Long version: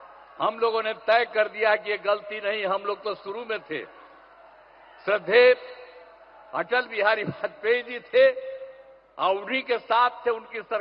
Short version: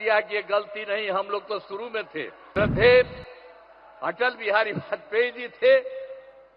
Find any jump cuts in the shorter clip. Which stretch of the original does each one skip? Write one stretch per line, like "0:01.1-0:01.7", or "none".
0:03.9-0:04.9